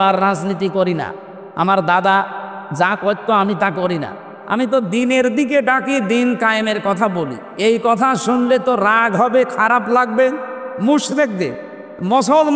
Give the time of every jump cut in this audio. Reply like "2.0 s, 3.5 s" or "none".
none